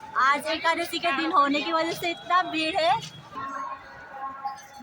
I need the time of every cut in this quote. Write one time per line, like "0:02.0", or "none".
0:03.3